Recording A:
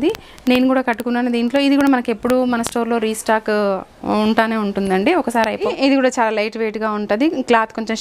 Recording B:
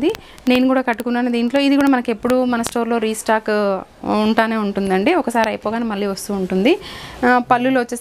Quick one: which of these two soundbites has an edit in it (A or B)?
A